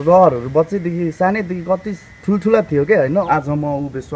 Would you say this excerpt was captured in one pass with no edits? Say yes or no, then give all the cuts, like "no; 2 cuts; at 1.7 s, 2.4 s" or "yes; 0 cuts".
no; 1 cut; at 3.2 s